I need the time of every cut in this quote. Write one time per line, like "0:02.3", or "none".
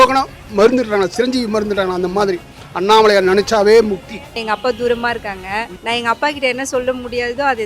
0:04.4
0:05.7

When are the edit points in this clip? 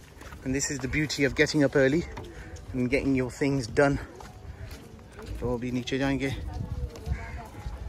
none

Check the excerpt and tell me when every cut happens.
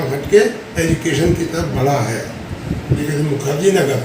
0:03.0

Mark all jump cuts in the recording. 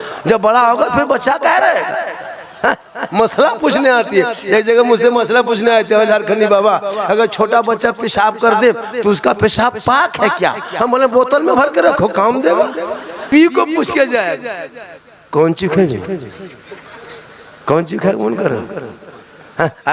0:13.3

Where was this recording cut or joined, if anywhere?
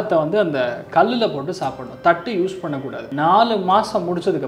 0:03.0

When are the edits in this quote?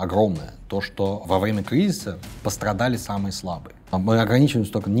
0:01.2
0:03.9

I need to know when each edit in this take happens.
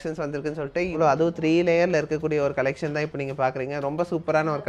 0:01.0

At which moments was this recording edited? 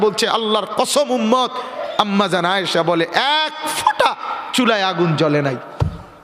0:01.8

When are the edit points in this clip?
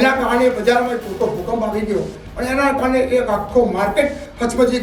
none

